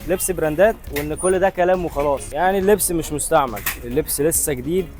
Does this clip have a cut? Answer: no; 0 cuts

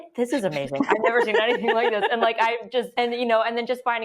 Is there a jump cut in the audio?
yes; 1 cut; at 2.9 s

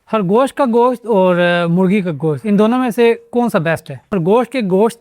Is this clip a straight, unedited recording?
no; 1 cut; at 4.1 s

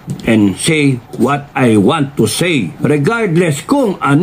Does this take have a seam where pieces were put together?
yes; 1 cut; at 2.7 s

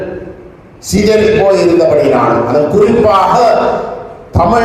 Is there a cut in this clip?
no; 0 cuts

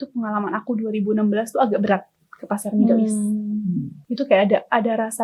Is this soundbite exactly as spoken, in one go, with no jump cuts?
yes; 0 cuts

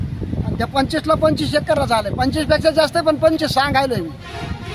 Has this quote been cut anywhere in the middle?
no; 0 cuts

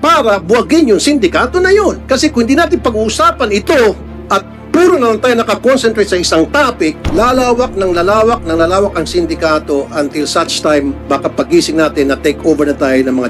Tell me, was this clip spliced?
yes; 3 cuts; at 2.0 s, 4.1 s, 7.0 s

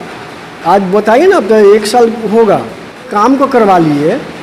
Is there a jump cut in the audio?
yes; 1 cut; at 3.0 s

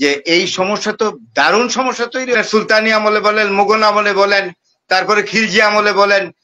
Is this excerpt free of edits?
no; 1 cut; at 2.4 s

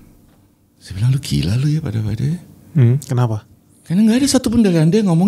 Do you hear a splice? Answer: no; 0 cuts

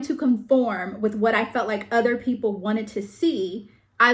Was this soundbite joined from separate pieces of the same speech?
no; 0 cuts

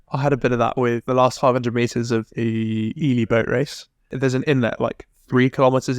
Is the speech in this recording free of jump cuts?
no; 2 cuts; at 1.1 s, 4.1 s

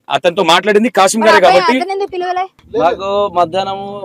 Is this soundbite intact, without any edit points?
yes; 0 cuts

